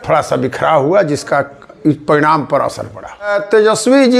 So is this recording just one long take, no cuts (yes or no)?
no